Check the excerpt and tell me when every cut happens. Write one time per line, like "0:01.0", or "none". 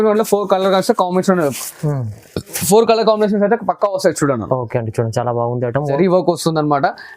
0:06.0